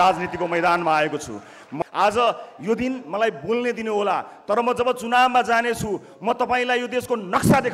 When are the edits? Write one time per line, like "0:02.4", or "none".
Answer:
0:01.7

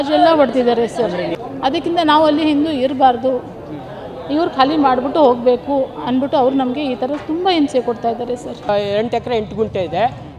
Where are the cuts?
0:01.3
0:08.7

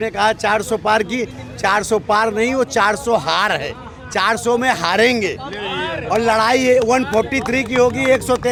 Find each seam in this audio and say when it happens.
none

